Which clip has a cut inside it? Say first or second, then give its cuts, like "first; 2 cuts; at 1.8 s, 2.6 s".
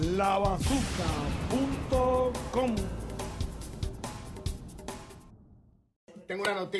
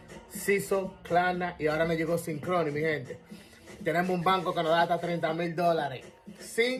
first; 1 cut; at 5.8 s